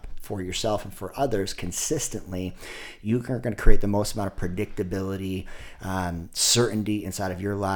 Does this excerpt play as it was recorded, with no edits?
yes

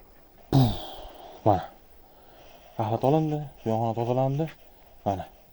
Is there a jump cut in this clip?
no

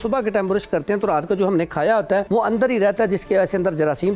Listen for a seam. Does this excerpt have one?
yes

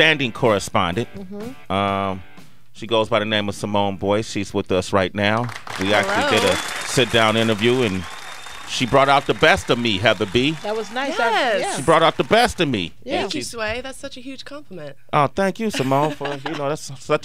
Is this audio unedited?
no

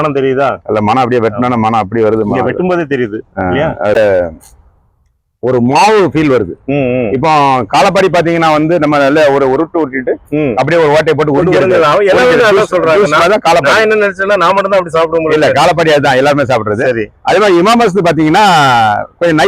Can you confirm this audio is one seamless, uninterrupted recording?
no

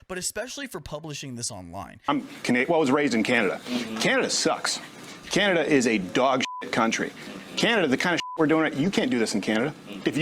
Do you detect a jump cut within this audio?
yes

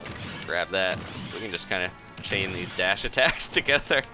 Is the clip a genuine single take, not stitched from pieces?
yes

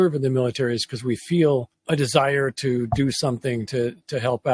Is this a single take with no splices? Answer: no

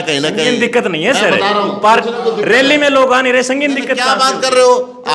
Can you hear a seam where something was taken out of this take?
no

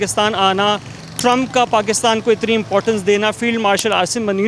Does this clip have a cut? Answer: no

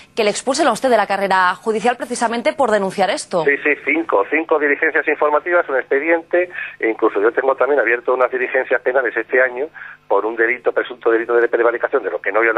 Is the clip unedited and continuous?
yes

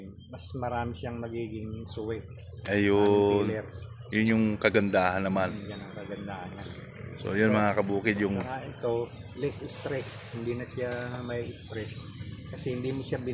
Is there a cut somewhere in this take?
no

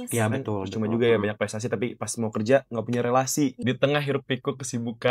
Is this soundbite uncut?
no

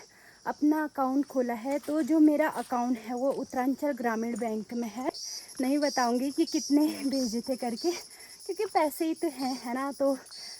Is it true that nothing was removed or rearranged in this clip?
no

